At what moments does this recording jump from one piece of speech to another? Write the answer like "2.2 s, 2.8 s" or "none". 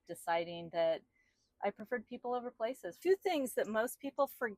3.0 s